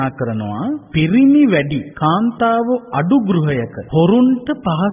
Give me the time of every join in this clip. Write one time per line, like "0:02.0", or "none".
0:00.9
0:01.8
0:03.8